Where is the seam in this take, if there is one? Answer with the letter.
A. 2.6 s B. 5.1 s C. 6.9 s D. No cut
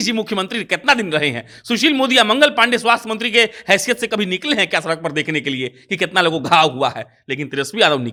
D